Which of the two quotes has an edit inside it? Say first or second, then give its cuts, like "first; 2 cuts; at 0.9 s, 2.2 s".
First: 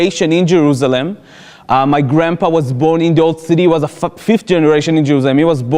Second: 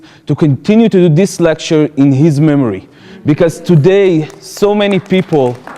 second; 1 cut; at 4.4 s